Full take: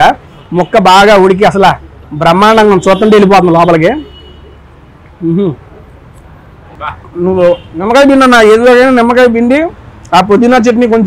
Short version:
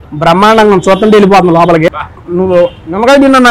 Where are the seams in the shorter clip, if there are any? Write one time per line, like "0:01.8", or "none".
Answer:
0:02.0